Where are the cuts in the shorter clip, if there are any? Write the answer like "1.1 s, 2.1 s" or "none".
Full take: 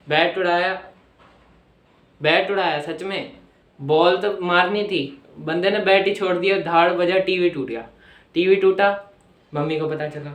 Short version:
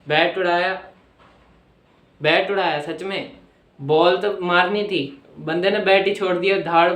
none